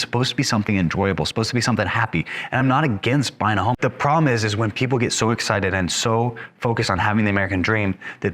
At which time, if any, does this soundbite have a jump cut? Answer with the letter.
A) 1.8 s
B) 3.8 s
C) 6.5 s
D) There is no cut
B